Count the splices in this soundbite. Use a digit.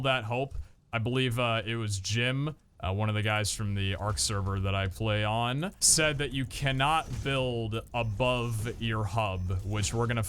1